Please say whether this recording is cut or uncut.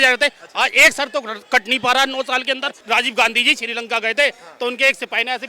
cut